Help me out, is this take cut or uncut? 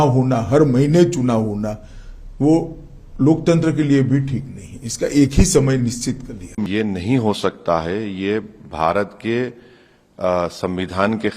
cut